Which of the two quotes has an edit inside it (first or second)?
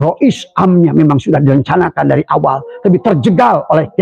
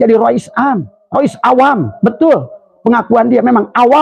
second